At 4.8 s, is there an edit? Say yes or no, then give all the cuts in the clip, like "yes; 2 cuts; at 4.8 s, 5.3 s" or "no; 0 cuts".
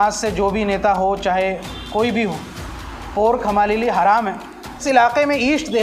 yes; 1 cut; at 4.8 s